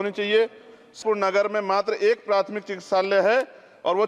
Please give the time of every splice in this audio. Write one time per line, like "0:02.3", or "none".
0:01.0